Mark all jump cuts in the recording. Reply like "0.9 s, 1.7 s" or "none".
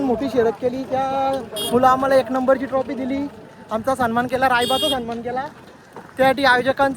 none